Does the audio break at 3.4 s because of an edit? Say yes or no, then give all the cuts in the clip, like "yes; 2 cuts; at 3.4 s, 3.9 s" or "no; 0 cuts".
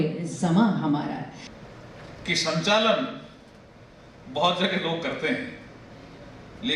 no; 1 cut; at 1.5 s